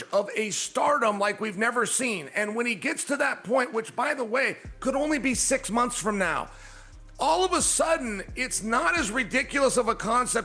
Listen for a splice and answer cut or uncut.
uncut